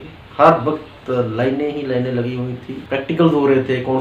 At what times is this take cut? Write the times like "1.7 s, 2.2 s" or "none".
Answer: 2.7 s